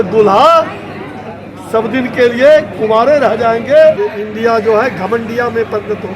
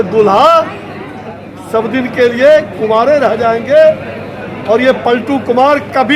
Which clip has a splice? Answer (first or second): first